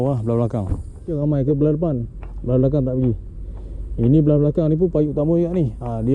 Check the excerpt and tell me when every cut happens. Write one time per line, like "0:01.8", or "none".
0:01.2